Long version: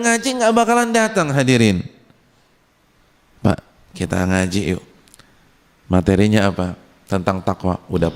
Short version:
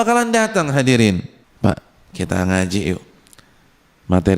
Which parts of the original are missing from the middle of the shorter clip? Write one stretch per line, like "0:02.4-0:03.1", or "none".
0:02.0-0:03.2